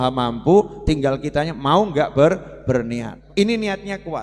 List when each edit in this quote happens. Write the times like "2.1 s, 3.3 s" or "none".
3.1 s